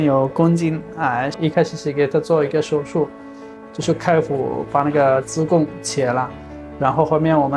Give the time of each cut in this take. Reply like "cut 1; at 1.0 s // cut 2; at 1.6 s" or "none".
cut 1; at 1.3 s